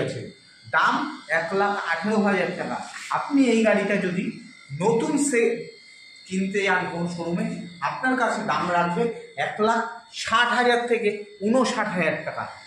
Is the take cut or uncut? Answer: uncut